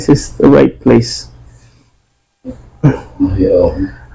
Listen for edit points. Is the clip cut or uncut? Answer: uncut